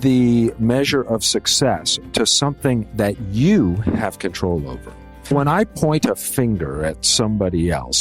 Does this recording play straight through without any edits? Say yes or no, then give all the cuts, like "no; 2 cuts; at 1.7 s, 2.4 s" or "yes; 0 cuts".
no; 1 cut; at 5.3 s